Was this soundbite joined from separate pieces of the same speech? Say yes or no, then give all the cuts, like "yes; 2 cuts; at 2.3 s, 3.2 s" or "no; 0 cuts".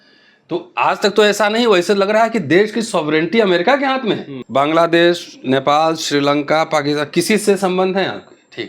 yes; 1 cut; at 4.3 s